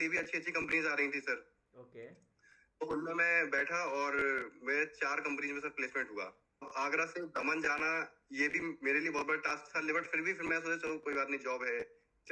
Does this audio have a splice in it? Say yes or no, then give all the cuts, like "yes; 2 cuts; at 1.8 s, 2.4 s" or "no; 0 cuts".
yes; 1 cut; at 6.7 s